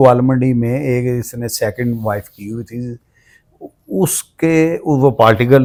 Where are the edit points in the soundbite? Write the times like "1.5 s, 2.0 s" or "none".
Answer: none